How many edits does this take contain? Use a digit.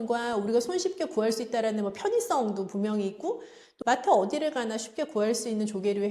1